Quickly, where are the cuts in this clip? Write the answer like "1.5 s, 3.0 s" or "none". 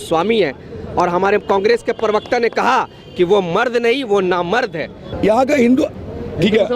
5.0 s